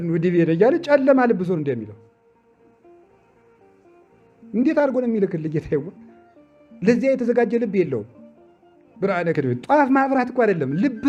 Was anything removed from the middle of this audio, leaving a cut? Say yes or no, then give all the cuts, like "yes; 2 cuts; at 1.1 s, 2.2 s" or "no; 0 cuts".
no; 0 cuts